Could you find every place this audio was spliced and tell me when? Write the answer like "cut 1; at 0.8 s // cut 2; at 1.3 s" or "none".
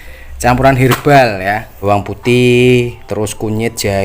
cut 1; at 1.8 s